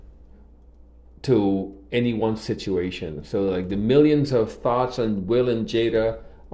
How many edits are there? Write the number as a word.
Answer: zero